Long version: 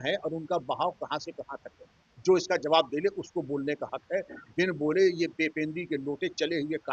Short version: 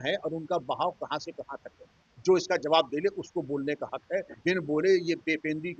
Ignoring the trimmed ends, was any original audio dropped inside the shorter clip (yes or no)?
yes